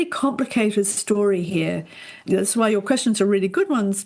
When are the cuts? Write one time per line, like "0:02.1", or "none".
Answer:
0:02.2